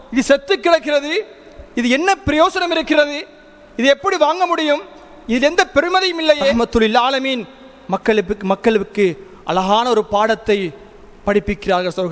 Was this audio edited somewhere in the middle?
yes; 1 cut; at 6.5 s

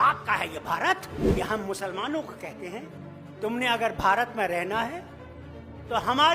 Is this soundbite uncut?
no; 1 cut; at 1.2 s

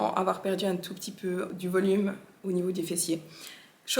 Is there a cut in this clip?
yes; 1 cut; at 1.5 s

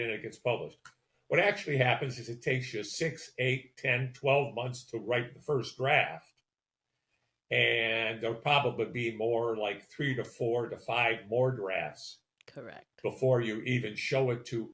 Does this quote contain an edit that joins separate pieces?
no; 0 cuts

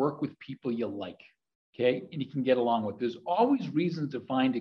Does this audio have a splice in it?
no; 0 cuts

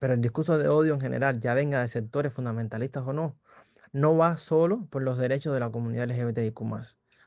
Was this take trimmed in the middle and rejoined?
no; 0 cuts

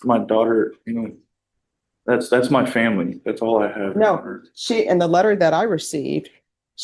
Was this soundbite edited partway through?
no; 0 cuts

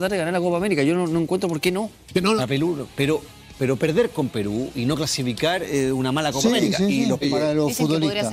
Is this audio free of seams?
no; 2 cuts; at 2.4 s, 7.2 s

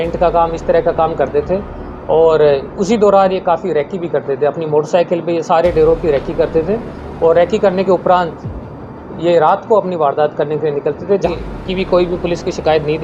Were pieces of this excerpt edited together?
yes; 1 cut; at 11.3 s

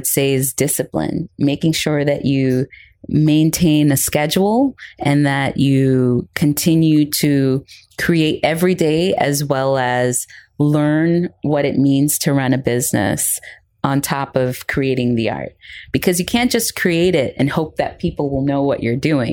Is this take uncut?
yes; 0 cuts

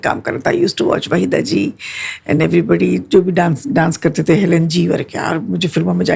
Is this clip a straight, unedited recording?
yes; 0 cuts

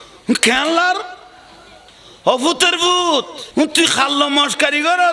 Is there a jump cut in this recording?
yes; 1 cut; at 3.4 s

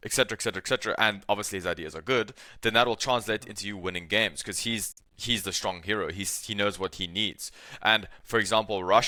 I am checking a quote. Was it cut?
no; 0 cuts

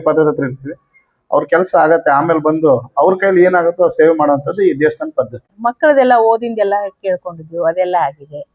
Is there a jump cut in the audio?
yes; 1 cut; at 5.4 s

